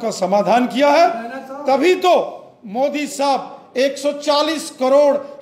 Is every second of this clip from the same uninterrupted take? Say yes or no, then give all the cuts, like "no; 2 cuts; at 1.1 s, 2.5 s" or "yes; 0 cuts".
yes; 0 cuts